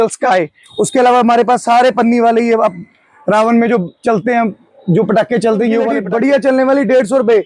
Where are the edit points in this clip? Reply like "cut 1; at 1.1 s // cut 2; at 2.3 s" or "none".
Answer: none